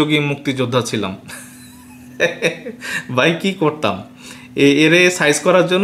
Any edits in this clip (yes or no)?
no